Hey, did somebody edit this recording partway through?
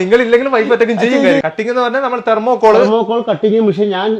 yes; 1 cut; at 1.4 s

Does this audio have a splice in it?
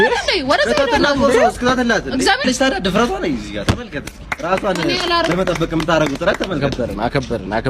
yes; 1 cut; at 2.4 s

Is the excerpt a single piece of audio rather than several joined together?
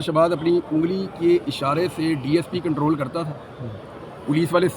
yes; 0 cuts

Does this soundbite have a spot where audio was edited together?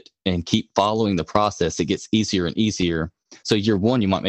no; 0 cuts

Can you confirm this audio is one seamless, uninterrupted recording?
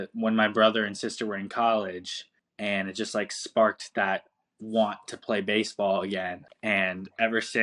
yes; 0 cuts

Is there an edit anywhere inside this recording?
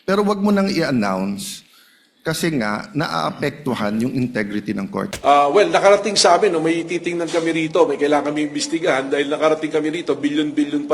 yes; 1 cut; at 5.1 s

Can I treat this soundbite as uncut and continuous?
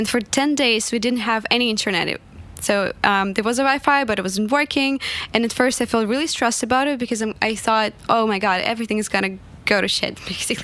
yes; 0 cuts

